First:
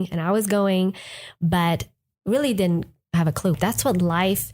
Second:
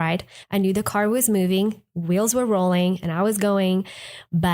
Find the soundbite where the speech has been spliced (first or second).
first